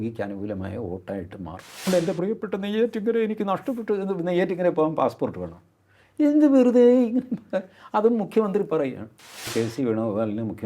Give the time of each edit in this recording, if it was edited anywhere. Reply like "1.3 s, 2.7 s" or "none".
1.9 s, 9.5 s